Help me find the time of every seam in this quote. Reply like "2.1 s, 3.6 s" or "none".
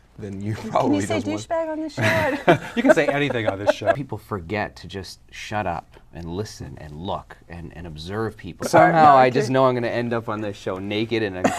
4.0 s, 8.7 s